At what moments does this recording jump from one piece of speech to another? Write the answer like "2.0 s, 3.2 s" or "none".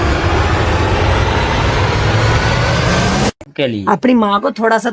3.5 s